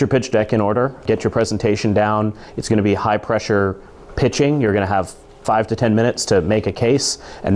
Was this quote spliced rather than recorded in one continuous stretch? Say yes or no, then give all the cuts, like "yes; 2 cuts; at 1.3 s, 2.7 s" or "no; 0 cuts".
no; 0 cuts